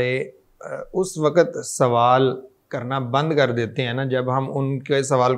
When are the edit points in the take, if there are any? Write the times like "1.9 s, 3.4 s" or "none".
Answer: none